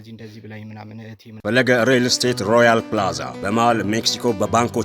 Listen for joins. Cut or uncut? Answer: cut